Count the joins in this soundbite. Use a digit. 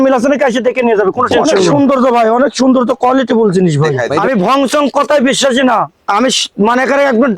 2